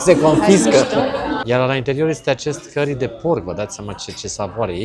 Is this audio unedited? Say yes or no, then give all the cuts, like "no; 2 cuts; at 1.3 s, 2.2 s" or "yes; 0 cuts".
no; 1 cut; at 1.4 s